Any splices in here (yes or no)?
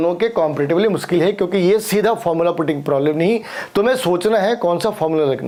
no